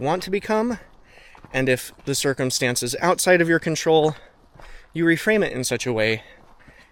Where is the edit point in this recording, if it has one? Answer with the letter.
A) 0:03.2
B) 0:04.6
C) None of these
C